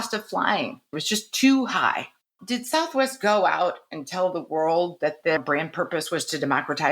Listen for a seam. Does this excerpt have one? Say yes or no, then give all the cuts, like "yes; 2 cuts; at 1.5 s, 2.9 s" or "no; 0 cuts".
yes; 2 cuts; at 1.0 s, 2.3 s